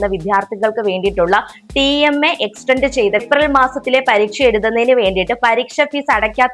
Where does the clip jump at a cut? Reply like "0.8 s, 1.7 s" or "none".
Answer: 3.2 s